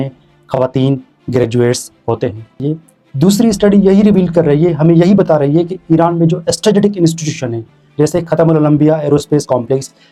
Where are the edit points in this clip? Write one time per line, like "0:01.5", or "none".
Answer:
none